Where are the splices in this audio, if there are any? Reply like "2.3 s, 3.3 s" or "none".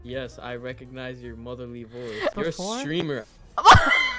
2.3 s